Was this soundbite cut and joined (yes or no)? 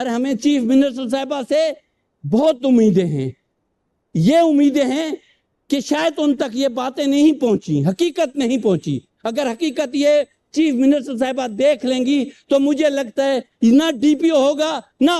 no